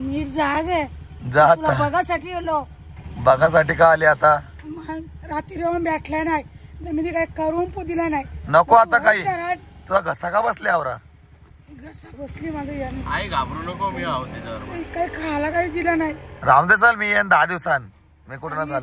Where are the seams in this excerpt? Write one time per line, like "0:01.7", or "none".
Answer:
none